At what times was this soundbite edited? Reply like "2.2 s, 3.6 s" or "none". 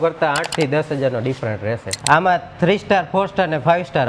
1.9 s